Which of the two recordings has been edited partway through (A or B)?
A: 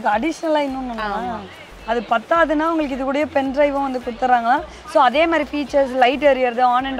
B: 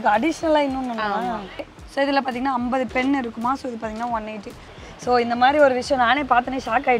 B